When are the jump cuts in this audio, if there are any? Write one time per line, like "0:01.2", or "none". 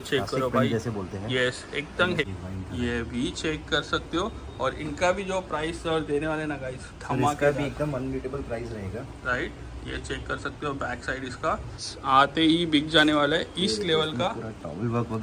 0:02.2
0:11.9